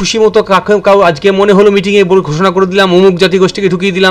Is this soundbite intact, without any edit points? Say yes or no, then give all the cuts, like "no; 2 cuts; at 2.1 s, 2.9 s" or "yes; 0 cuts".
yes; 0 cuts